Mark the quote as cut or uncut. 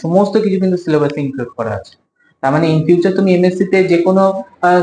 uncut